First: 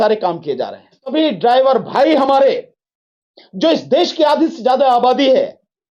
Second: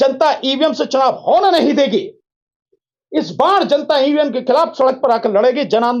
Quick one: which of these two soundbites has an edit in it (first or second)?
first